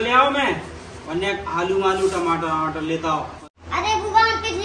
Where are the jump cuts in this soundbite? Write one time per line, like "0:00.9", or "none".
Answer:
0:03.4